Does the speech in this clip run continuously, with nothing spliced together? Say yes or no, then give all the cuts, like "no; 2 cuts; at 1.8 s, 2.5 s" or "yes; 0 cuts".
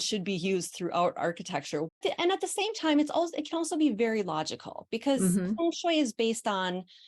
no; 1 cut; at 1.9 s